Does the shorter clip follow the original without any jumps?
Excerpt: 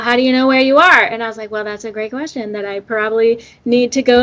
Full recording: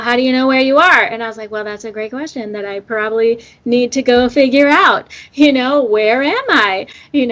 yes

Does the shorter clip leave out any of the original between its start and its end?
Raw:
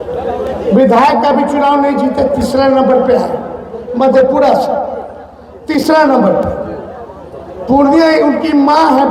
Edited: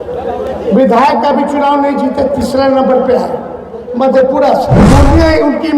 yes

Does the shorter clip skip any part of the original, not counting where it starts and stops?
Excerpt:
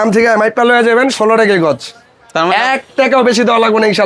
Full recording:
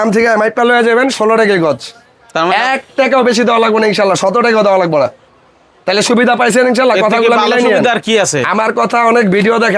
no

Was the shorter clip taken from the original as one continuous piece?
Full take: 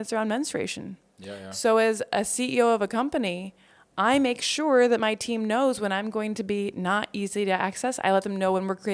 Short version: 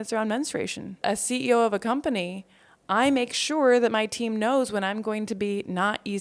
no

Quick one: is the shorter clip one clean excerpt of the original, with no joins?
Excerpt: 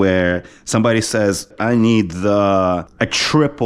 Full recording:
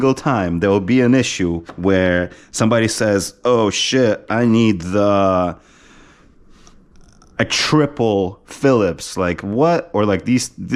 no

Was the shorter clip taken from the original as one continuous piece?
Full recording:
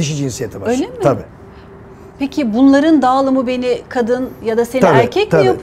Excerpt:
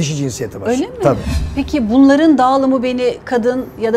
no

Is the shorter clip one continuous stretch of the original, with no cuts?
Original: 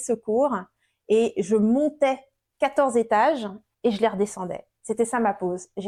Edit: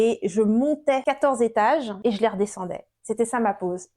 no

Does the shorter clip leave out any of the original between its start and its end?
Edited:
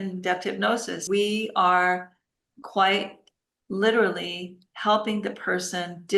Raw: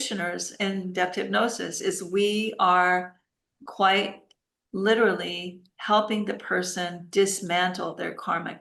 yes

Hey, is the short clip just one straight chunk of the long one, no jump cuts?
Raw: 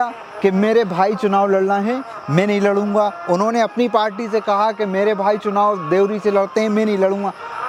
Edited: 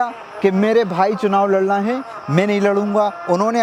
yes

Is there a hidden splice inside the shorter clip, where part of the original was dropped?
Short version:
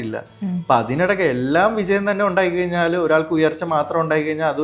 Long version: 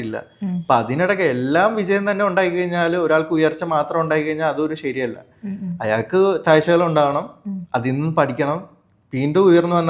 no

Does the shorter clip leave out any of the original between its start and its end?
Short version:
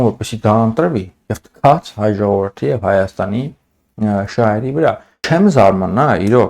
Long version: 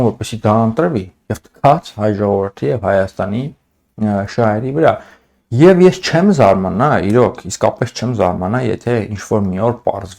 yes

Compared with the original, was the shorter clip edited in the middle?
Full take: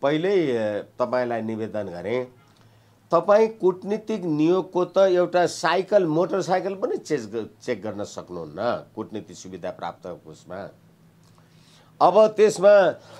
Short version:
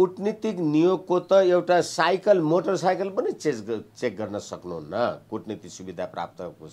no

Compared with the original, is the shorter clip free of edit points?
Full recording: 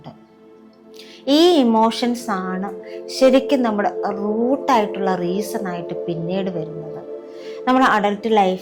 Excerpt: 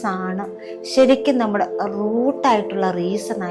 yes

